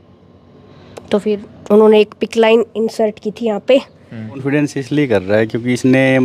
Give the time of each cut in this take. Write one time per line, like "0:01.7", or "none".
0:04.4